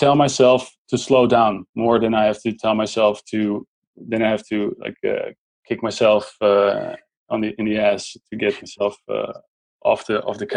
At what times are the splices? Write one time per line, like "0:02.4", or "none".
none

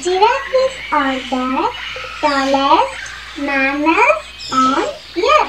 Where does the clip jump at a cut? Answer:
none

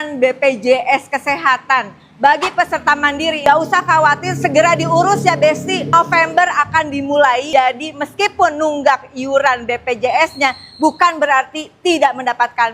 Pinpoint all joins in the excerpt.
0:03.4

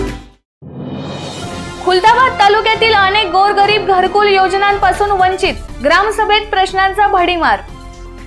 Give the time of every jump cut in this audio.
0:01.5

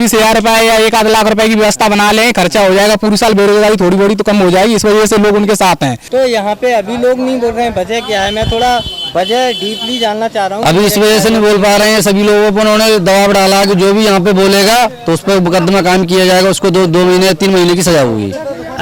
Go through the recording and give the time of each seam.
0:06.0

